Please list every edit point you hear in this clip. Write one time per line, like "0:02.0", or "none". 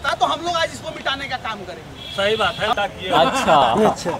0:02.7